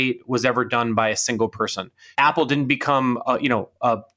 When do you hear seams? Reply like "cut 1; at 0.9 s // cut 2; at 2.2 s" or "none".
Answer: cut 1; at 2.0 s